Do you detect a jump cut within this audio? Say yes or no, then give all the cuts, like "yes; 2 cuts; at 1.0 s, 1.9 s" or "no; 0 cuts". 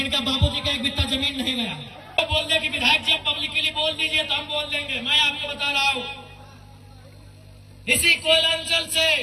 yes; 1 cut; at 2.2 s